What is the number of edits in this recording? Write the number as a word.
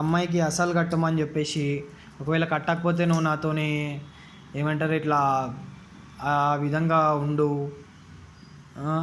zero